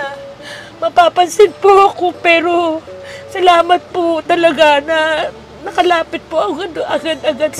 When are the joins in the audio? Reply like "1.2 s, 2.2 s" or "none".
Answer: none